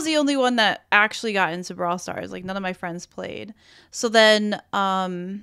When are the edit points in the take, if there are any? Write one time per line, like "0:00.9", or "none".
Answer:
none